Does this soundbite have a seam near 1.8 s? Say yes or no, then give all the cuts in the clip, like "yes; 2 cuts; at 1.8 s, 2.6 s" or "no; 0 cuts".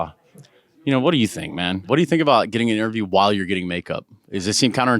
yes; 1 cut; at 1.8 s